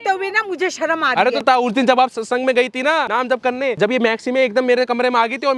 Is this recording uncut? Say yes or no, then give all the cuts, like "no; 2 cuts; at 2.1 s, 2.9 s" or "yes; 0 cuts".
no; 2 cuts; at 1.4 s, 3.4 s